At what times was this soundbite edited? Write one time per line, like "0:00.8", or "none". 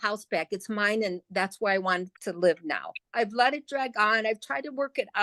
0:03.0